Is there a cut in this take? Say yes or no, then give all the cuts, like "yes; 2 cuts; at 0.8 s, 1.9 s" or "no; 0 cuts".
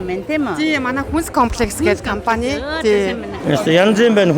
yes; 1 cut; at 3.3 s